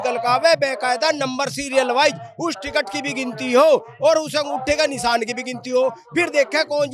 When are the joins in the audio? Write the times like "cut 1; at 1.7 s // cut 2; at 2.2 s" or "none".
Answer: none